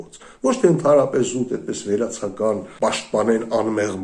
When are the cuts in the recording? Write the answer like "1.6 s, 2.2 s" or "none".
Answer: 2.7 s